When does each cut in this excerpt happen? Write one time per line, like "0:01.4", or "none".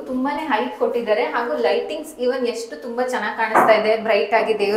none